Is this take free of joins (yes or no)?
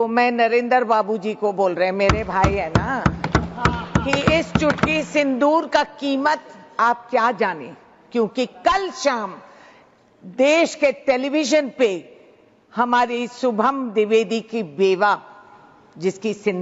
yes